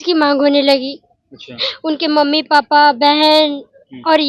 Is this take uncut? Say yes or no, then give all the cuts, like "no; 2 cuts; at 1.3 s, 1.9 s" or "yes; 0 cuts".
yes; 0 cuts